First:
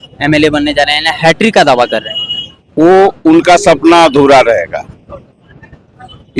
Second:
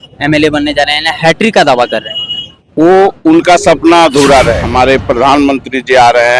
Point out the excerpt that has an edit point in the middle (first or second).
second